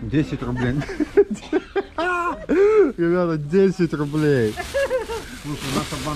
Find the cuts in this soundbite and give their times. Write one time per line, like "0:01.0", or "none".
none